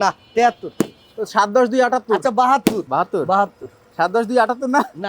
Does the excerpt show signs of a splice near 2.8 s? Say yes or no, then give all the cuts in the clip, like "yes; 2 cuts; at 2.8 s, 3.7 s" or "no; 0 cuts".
yes; 1 cut; at 2.8 s